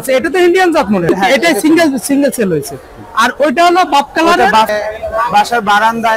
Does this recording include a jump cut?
yes; 2 cuts; at 1.1 s, 4.7 s

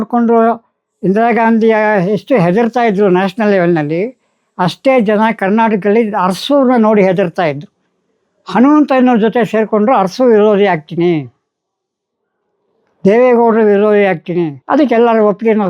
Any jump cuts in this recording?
yes; 1 cut; at 14.6 s

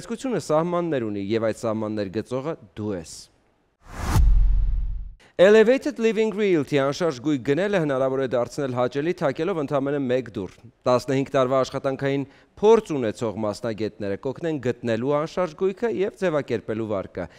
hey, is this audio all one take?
no; 1 cut; at 3.8 s

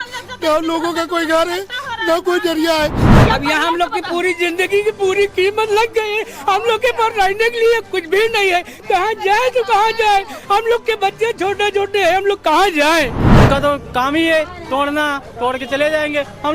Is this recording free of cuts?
no; 2 cuts; at 3.1 s, 13.3 s

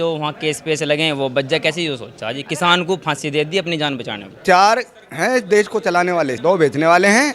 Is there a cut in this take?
yes; 2 cuts; at 4.4 s, 6.4 s

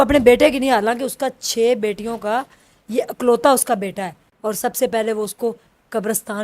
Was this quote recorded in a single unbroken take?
no; 1 cut; at 4.2 s

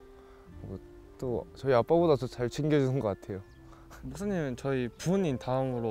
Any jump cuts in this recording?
yes; 1 cut; at 3.9 s

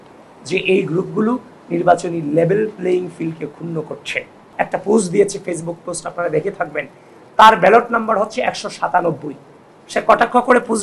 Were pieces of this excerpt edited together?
yes; 1 cut; at 4.5 s

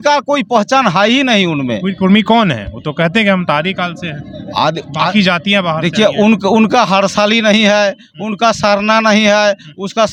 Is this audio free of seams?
yes; 0 cuts

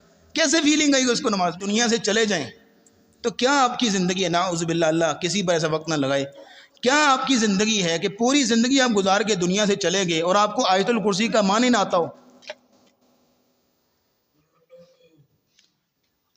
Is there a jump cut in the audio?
yes; 1 cut; at 1.7 s

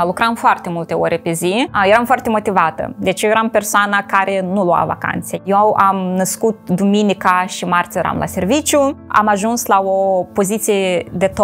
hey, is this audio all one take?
no; 3 cuts; at 1.7 s, 5.4 s, 9.0 s

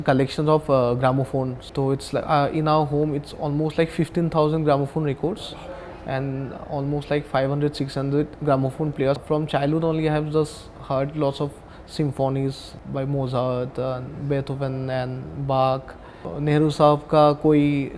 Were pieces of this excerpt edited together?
yes; 4 cuts; at 1.6 s, 9.2 s, 12.7 s, 16.3 s

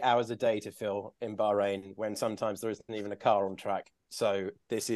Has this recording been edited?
no; 0 cuts

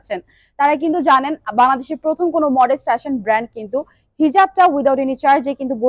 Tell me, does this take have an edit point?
no; 0 cuts

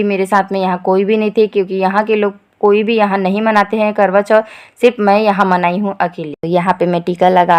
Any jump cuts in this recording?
no; 0 cuts

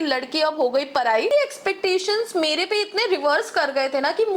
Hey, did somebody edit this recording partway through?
yes; 1 cut; at 1.3 s

